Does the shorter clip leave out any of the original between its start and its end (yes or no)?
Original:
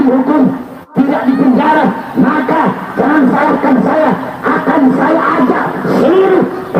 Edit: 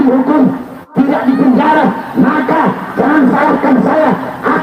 no